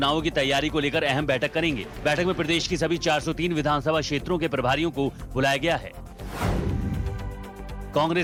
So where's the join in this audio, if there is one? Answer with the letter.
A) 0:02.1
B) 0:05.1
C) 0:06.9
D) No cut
D